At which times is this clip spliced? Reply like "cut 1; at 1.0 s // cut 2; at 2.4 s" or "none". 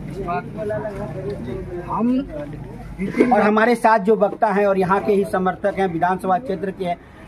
cut 1; at 3.1 s